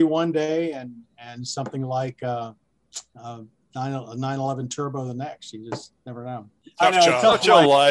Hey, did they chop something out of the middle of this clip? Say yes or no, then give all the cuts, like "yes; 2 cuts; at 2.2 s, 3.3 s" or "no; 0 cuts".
yes; 1 cut; at 6.6 s